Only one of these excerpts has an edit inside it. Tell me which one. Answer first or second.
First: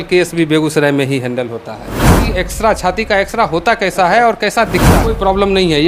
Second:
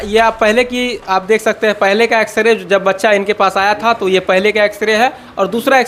first